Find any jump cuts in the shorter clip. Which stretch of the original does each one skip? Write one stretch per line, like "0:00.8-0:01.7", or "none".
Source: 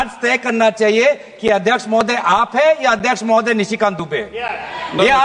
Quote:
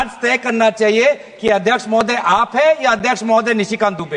none